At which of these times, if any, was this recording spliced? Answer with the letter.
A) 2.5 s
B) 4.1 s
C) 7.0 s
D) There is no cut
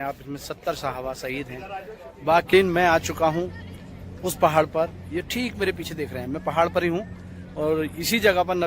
A